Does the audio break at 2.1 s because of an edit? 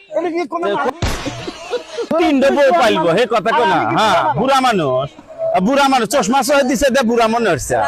yes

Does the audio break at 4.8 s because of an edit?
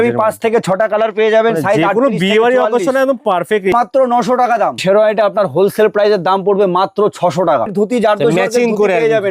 yes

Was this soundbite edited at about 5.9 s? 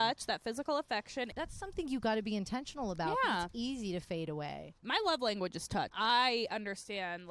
yes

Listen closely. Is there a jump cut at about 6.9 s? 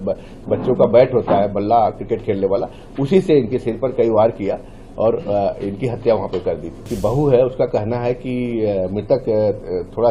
yes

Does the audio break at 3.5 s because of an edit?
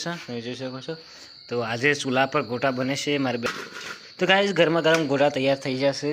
yes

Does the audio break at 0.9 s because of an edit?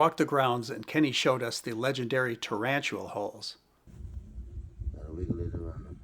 no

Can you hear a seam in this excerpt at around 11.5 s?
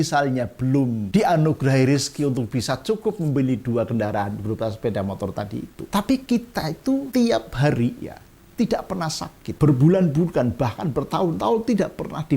no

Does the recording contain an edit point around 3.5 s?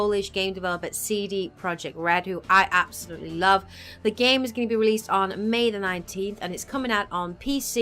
yes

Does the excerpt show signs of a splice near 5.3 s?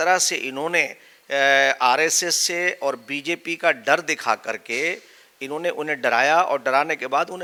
no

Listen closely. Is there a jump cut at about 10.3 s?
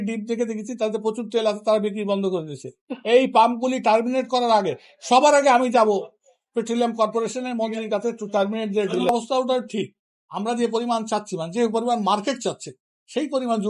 no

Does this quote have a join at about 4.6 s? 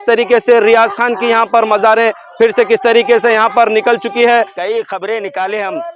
yes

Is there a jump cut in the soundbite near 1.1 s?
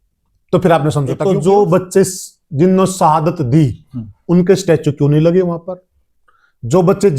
yes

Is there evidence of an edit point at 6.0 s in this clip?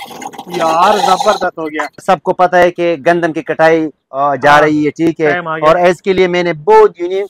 no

